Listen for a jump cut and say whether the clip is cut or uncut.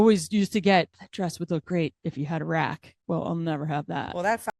cut